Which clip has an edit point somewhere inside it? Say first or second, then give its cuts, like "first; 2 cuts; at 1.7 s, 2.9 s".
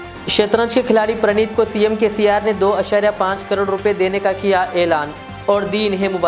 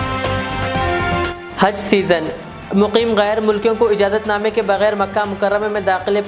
second; 1 cut; at 1.4 s